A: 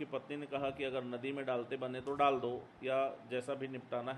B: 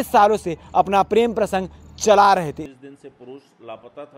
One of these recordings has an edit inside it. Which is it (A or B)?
B